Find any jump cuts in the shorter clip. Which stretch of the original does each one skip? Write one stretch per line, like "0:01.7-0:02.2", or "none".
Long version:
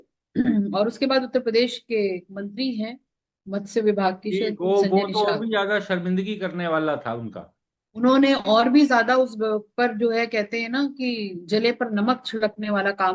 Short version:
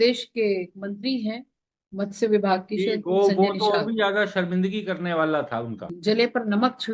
0:07.4-0:11.3